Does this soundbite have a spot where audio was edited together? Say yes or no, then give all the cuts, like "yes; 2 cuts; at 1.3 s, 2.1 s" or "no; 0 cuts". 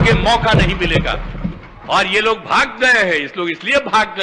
no; 0 cuts